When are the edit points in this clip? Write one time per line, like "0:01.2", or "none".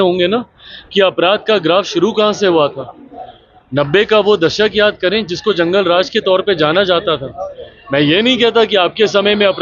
none